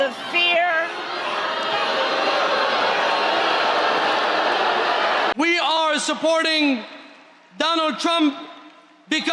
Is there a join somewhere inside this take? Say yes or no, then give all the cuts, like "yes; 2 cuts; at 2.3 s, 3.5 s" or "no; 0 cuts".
yes; 1 cut; at 5.3 s